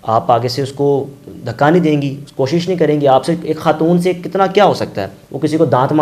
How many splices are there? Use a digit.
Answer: 0